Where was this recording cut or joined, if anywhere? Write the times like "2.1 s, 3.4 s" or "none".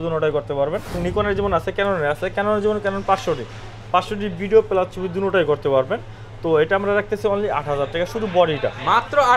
1.0 s